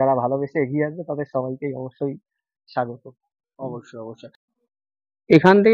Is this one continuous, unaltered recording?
no; 1 cut; at 4.3 s

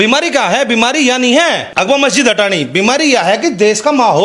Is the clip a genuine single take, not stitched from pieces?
no; 1 cut; at 1.6 s

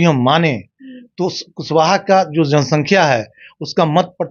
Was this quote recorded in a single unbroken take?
yes; 0 cuts

